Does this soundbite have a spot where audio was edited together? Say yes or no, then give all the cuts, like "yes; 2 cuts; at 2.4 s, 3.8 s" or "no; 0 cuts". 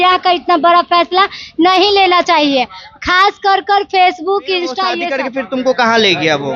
yes; 1 cut; at 5.1 s